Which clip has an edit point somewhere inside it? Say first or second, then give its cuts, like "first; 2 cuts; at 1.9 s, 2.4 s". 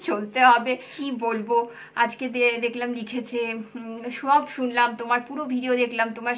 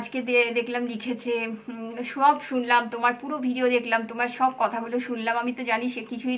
first; 1 cut; at 0.9 s